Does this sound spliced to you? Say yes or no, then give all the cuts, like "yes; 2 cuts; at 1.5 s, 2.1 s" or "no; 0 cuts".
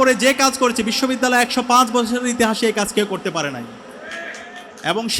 no; 0 cuts